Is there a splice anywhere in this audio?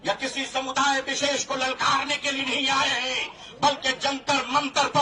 no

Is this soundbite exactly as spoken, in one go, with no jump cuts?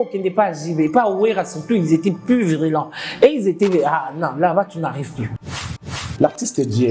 no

